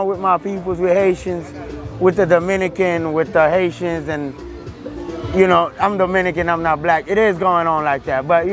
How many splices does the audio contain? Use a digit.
0